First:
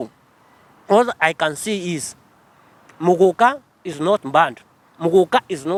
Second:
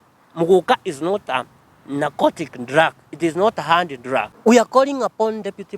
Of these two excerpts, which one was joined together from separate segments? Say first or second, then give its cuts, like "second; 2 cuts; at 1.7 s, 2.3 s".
second; 1 cut; at 4.3 s